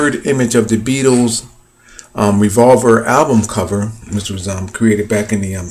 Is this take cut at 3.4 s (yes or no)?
yes